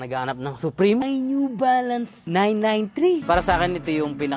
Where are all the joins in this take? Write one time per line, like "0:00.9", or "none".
0:01.0
0:03.2

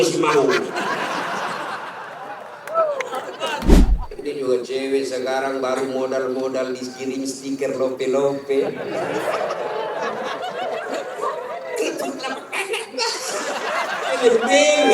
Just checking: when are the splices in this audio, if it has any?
0:03.8

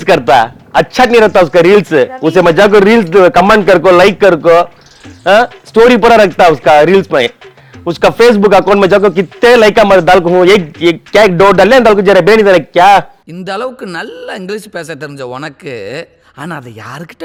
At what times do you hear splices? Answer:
none

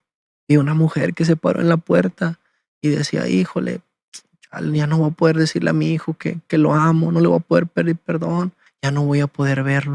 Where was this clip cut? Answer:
0:08.7

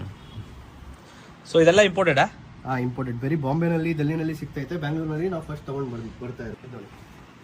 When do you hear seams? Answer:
0:06.5

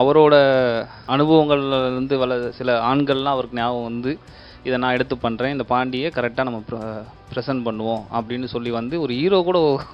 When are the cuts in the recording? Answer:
0:00.9

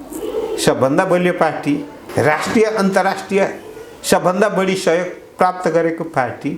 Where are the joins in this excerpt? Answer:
0:02.0

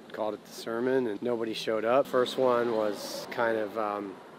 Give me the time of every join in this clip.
0:01.2
0:02.1
0:03.2

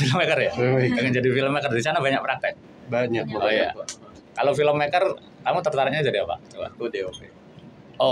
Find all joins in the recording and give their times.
none

